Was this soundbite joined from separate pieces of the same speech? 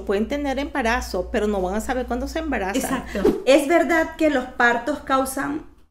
yes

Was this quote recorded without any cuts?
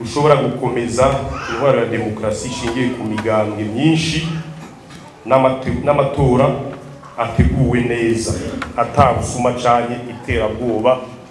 yes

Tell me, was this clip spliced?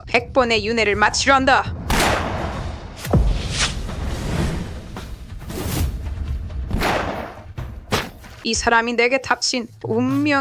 yes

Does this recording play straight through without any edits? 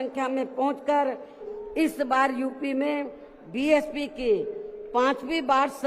no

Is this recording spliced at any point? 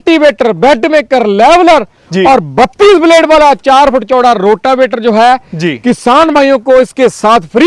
no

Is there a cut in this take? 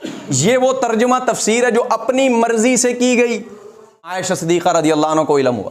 yes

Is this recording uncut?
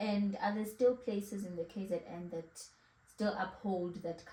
yes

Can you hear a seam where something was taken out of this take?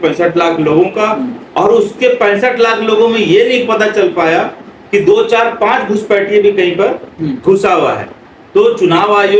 no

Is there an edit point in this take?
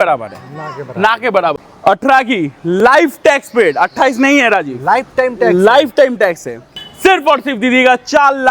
yes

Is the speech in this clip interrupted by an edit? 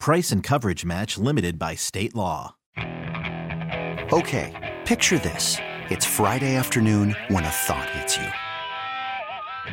yes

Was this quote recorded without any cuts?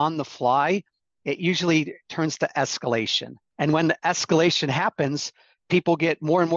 yes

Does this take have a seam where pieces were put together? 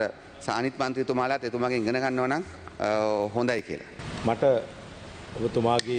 no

